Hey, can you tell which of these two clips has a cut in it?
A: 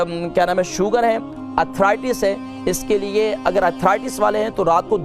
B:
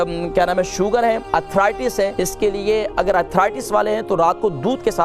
B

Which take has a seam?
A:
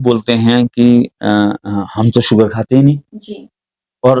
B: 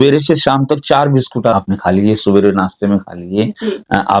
B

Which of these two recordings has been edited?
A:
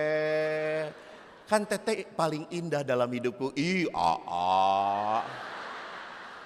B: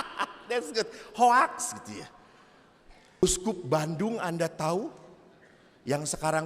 B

